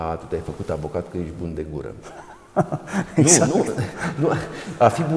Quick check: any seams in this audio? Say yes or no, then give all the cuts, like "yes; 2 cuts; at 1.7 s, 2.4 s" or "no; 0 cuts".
no; 0 cuts